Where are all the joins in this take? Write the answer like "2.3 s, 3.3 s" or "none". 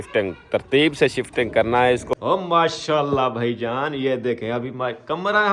2.0 s